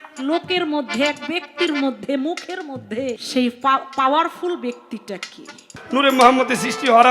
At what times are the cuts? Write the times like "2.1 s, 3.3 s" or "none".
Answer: 3.2 s, 5.7 s